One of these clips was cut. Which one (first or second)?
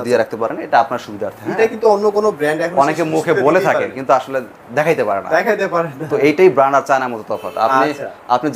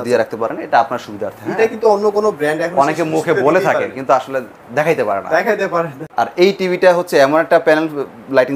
second